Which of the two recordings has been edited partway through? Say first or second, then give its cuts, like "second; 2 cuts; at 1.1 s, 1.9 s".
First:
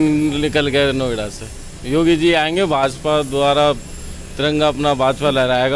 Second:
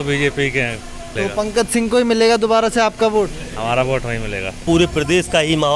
second; 2 cuts; at 1.1 s, 4.6 s